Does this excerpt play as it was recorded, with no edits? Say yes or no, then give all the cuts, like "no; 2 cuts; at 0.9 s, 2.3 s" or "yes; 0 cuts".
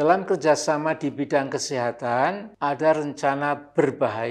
no; 1 cut; at 2.5 s